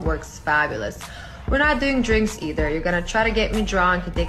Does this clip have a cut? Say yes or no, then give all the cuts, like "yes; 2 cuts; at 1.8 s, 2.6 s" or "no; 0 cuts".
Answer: yes; 1 cut; at 1.1 s